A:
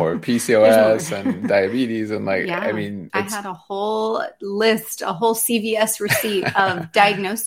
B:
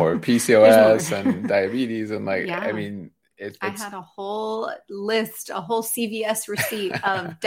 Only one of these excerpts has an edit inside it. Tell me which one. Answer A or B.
A